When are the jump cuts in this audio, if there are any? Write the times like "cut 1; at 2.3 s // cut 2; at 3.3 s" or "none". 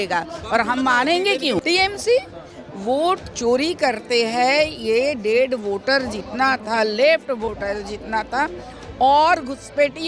cut 1; at 1.6 s